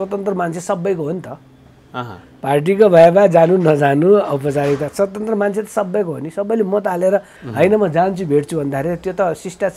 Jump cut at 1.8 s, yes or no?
no